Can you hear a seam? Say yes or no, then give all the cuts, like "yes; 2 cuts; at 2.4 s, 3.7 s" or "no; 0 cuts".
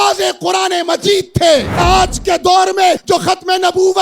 yes; 2 cuts; at 1.8 s, 3.0 s